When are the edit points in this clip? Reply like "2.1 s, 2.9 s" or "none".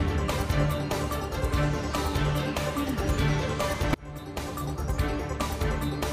1.5 s